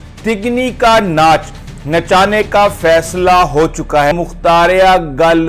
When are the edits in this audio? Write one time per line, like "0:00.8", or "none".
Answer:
0:04.1

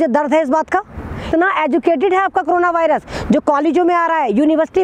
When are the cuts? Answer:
0:01.3

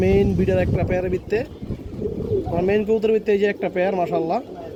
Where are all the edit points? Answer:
none

